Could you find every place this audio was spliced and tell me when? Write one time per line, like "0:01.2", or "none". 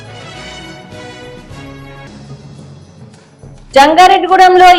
none